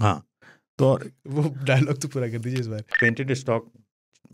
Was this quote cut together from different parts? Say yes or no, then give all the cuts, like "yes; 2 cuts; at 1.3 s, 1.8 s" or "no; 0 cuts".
yes; 1 cut; at 2.8 s